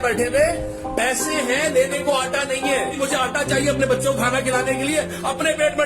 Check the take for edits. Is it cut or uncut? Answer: cut